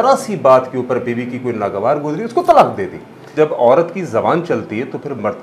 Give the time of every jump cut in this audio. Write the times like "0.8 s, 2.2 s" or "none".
3.3 s